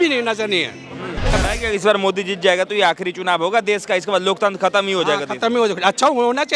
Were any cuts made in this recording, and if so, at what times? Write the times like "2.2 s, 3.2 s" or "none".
1.3 s